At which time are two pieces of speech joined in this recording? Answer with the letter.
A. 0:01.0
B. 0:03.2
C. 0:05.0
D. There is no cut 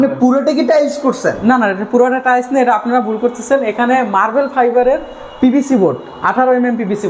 D